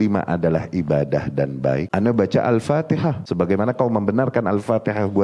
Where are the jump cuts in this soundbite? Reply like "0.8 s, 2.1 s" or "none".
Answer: 1.9 s, 3.2 s